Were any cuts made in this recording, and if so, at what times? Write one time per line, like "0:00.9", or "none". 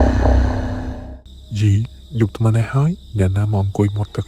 0:01.0